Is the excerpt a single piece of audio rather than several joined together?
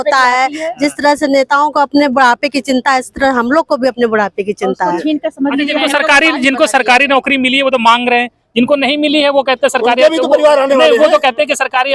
yes; 0 cuts

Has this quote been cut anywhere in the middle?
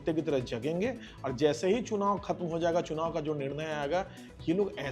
no; 0 cuts

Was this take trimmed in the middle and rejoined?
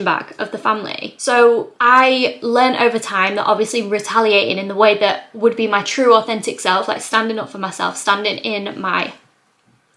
no; 0 cuts

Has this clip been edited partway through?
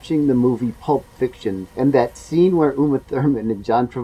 yes; 1 cut; at 1.6 s

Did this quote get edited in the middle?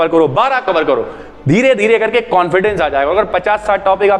no; 0 cuts

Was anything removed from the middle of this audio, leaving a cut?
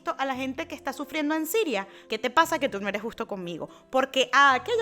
yes; 1 cut; at 2.0 s

